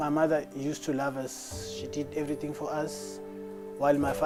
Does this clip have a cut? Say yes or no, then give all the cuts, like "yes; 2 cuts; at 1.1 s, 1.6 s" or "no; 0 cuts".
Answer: no; 0 cuts